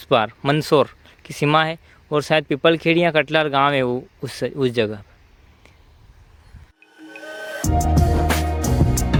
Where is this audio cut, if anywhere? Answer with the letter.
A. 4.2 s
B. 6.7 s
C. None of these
C